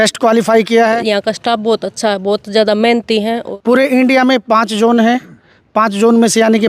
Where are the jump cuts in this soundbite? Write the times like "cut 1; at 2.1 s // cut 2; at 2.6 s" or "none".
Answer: cut 1; at 1.0 s // cut 2; at 3.4 s

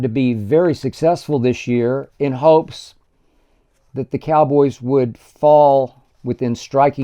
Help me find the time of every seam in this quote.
cut 1; at 6.1 s

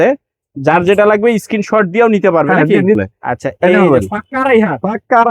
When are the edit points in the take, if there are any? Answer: cut 1; at 3.0 s

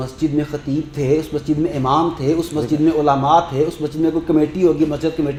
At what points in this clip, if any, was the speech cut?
none

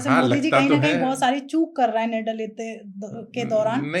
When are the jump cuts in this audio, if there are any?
none

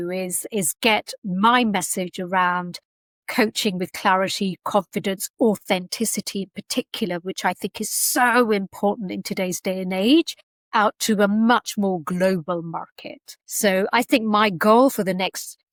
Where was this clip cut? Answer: none

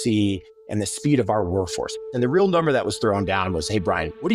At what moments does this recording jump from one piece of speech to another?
cut 1; at 2.0 s

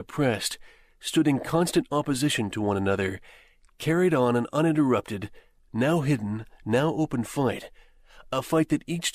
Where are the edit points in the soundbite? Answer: none

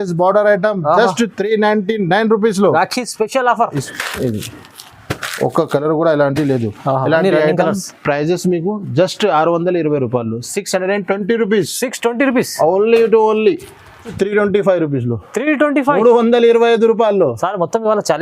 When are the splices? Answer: cut 1; at 3.9 s // cut 2; at 14.1 s

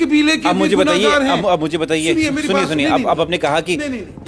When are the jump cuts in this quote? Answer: none

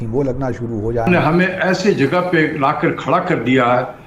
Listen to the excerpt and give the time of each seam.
cut 1; at 1.1 s

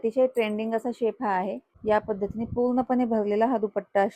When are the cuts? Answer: cut 1; at 1.7 s

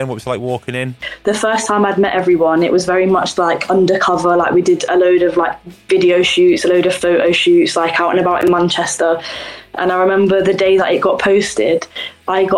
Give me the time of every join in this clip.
cut 1; at 1.1 s

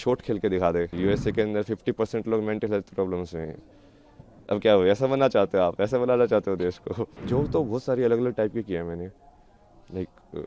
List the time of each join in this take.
cut 1; at 0.9 s // cut 2; at 7.1 s

